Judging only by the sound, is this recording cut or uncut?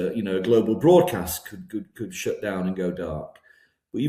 uncut